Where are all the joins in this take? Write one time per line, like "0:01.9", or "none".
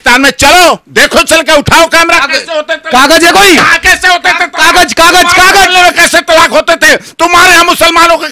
none